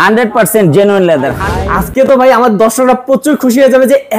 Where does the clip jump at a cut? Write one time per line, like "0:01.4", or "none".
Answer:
0:01.4